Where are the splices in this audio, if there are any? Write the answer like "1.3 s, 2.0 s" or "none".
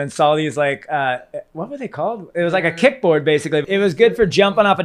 3.7 s

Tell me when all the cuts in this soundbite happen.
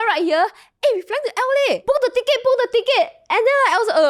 1.8 s

